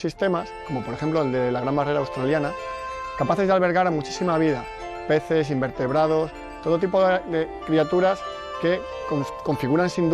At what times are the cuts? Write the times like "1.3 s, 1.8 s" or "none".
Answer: 4.6 s